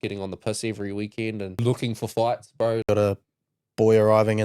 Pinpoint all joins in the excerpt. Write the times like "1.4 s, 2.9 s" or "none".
1.6 s, 2.9 s

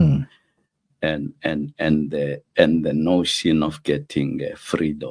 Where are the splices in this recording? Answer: none

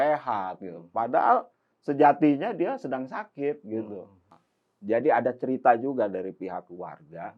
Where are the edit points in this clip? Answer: none

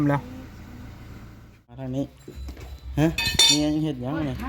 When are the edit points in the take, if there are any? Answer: 1.6 s

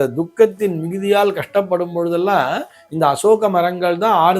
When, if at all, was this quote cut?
none

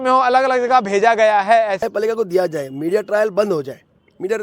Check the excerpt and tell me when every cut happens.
1.9 s

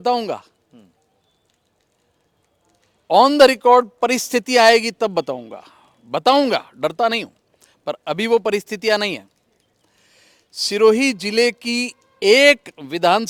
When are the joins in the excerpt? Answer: none

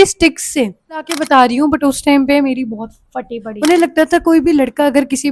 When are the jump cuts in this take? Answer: 1.2 s, 3.4 s

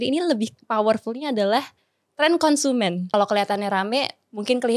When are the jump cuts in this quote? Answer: 3.1 s

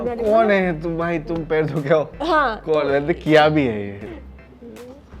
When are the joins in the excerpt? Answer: 4.0 s

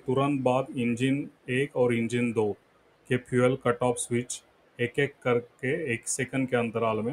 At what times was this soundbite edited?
none

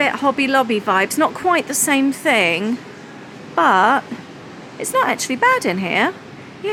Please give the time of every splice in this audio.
none

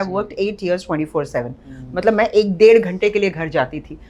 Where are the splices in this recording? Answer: none

